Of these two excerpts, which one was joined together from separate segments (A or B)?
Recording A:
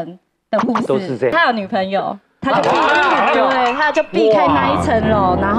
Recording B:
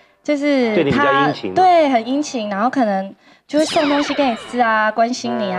A